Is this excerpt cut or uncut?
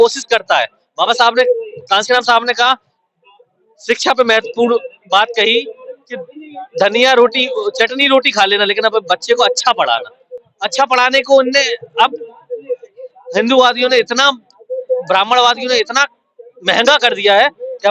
uncut